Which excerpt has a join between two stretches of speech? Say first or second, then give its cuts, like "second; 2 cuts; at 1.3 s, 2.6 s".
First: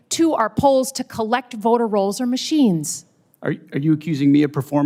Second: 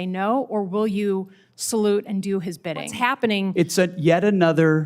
second; 1 cut; at 2.9 s